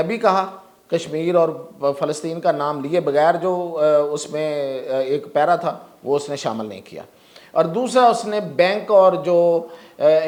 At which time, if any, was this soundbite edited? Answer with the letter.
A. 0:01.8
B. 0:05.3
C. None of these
C